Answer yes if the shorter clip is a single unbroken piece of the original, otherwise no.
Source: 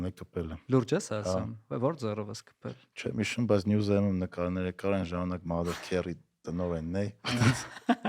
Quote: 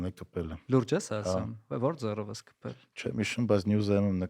yes